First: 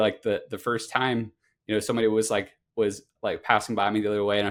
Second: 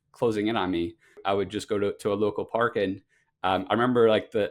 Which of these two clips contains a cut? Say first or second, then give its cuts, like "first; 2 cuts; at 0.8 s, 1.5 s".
second; 1 cut; at 1.2 s